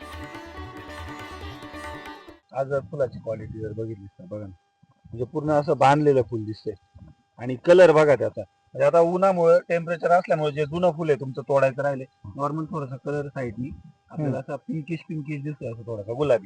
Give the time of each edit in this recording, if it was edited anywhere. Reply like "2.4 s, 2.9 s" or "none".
2.3 s, 12.2 s